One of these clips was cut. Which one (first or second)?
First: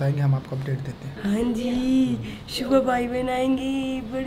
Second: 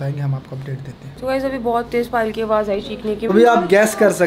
second